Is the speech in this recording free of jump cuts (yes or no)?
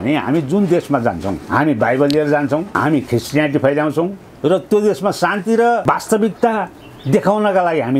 no